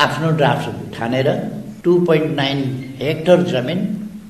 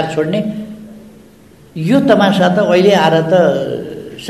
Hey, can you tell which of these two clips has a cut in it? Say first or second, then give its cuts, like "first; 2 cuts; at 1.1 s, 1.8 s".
first; 1 cut; at 1.6 s